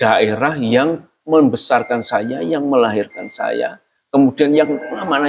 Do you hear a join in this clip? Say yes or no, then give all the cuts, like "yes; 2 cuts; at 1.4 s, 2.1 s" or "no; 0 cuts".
no; 0 cuts